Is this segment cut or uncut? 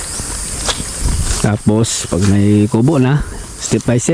cut